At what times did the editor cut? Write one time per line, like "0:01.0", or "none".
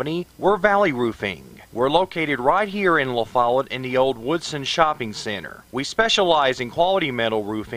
0:05.5